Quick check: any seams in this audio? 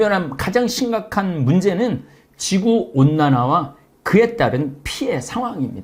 no; 0 cuts

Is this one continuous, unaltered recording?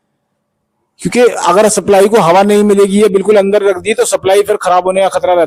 yes; 0 cuts

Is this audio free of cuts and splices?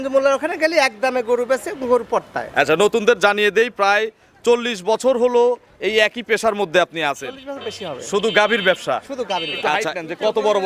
no; 1 cut; at 9.6 s

